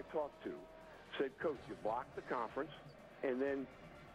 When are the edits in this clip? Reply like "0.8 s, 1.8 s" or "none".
none